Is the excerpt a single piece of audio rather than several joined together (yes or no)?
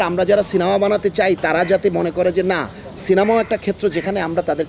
yes